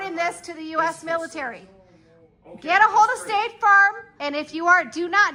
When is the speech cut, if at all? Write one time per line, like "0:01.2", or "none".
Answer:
none